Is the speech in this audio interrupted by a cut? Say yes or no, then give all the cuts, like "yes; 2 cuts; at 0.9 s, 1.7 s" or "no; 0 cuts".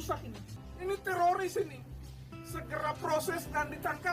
no; 0 cuts